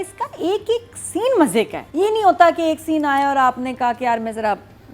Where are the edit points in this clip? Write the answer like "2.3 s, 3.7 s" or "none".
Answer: 1.8 s